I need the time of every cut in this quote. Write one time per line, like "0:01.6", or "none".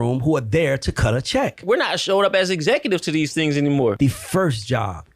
0:01.6
0:04.0